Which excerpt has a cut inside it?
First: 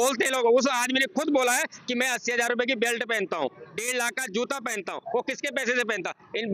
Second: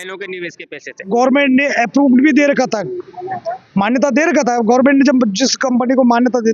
second; 1 cut; at 1.1 s

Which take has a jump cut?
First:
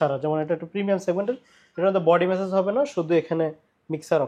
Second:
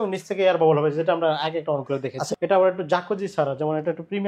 second; 1 cut; at 2.3 s

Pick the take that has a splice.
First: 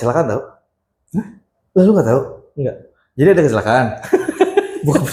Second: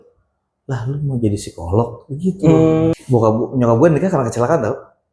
second; 1 cut; at 2.9 s

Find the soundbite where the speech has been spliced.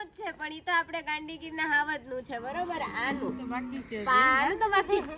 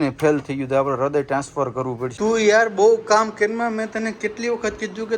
second; 1 cut; at 2.1 s

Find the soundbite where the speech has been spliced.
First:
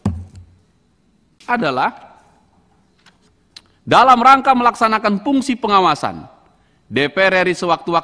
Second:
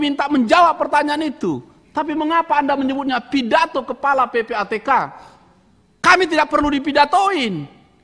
first; 1 cut; at 1.3 s

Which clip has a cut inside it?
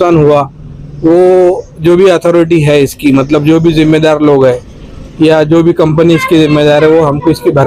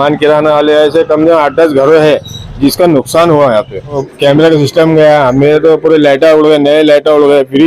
second; 1 cut; at 4.0 s

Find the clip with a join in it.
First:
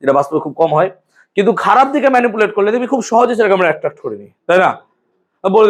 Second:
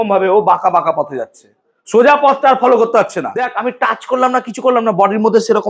second; 1 cut; at 3.5 s

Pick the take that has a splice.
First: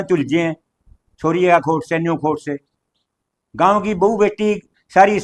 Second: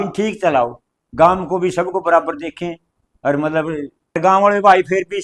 second; 1 cut; at 4.2 s

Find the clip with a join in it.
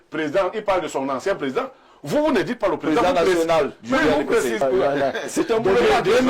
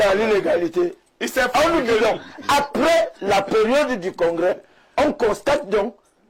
first; 1 cut; at 4.6 s

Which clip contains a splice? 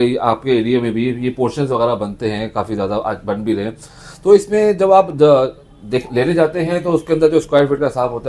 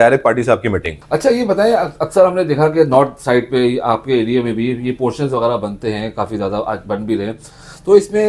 second; 1 cut; at 1.0 s

